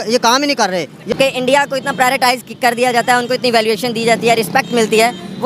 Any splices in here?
yes; 1 cut; at 1.1 s

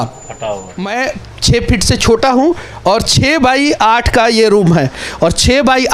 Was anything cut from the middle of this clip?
yes; 1 cut; at 0.9 s

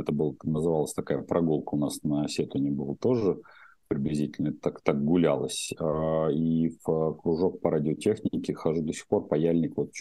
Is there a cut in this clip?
no; 0 cuts

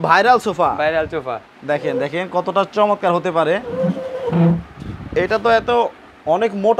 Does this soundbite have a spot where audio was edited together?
no; 0 cuts

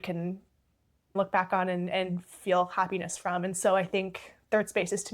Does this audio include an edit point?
yes; 1 cut; at 1.1 s

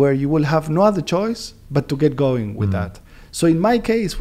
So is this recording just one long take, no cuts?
yes; 0 cuts

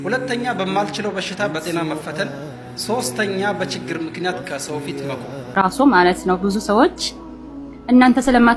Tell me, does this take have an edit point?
yes; 1 cut; at 5.5 s

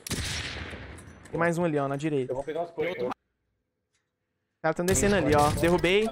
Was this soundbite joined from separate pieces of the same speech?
yes; 1 cut; at 3.1 s

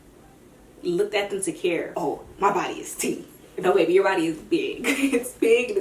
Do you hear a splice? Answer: yes; 1 cut; at 1.9 s

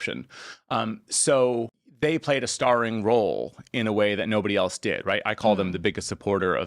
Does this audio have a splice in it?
yes; 1 cut; at 1.8 s

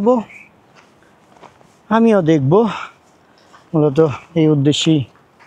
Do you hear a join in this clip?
no; 0 cuts

